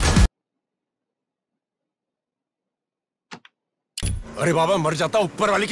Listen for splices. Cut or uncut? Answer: cut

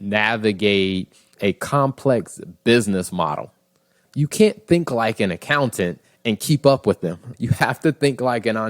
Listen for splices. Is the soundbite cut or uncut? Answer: cut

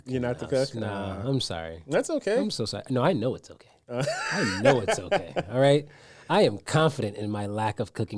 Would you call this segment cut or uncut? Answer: uncut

